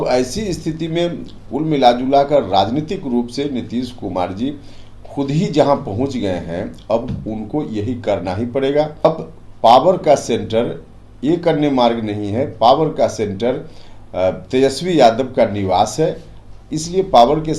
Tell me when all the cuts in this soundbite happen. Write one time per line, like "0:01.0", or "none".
0:09.0